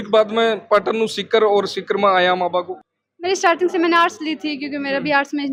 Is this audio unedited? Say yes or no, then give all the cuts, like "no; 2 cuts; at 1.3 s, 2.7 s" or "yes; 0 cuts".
yes; 0 cuts